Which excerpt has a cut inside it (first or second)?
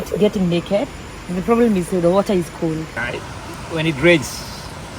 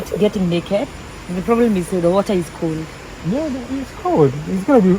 first